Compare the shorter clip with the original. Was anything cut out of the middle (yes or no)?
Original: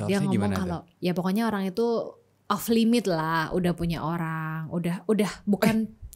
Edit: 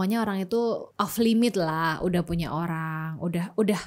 yes